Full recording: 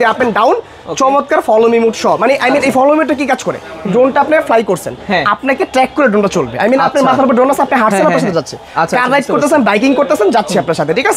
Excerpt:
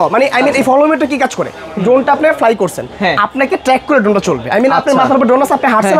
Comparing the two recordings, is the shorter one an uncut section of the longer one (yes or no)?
yes